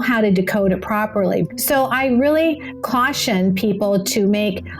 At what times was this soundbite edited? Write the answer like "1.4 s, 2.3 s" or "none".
1.5 s